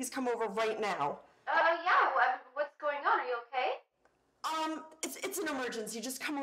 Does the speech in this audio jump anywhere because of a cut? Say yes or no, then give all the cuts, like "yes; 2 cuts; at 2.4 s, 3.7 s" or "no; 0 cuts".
yes; 1 cut; at 1.6 s